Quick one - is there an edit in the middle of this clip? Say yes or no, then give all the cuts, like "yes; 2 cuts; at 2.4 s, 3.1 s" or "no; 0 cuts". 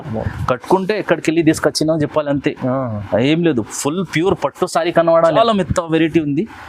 yes; 1 cut; at 5.3 s